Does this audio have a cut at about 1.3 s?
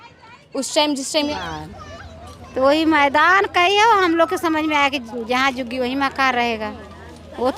yes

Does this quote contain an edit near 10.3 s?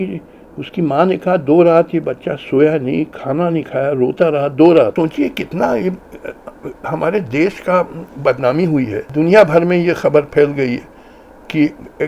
no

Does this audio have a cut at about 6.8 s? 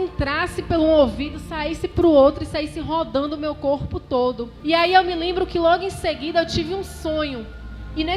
no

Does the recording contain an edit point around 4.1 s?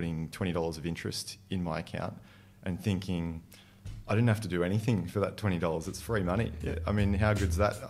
no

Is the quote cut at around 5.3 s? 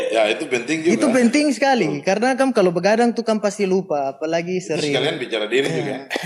no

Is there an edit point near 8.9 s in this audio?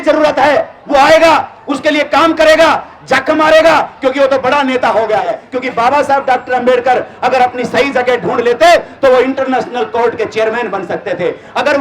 no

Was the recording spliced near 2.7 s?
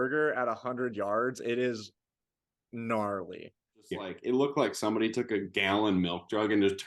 no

